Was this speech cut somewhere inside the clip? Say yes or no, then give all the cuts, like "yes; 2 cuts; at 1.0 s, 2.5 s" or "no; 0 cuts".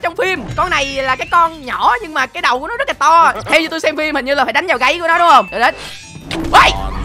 yes; 2 cuts; at 3.4 s, 5.5 s